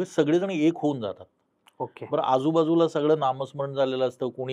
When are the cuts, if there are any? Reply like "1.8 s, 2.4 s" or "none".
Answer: none